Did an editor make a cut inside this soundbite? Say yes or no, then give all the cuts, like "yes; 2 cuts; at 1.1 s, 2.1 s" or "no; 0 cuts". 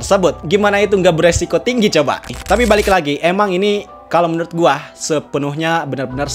yes; 1 cut; at 2.3 s